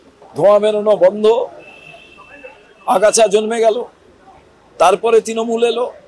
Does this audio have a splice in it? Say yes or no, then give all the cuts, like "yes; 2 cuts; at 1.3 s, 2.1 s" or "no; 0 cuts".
no; 0 cuts